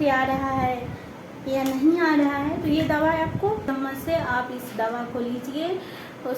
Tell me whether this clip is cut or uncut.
cut